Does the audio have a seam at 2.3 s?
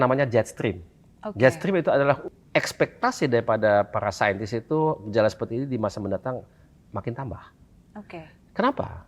yes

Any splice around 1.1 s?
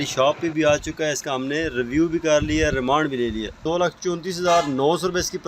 no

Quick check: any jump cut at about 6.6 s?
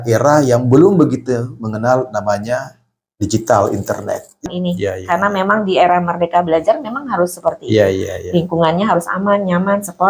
no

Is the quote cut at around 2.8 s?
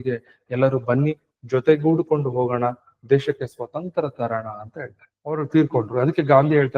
no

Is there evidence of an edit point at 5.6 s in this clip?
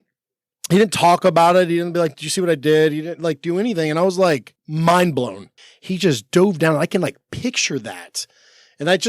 yes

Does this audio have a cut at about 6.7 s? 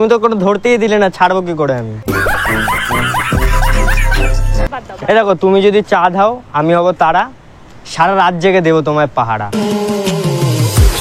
no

